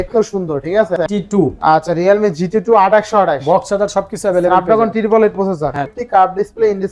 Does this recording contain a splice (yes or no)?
yes